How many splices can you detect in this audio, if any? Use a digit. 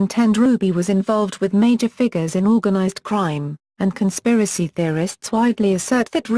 1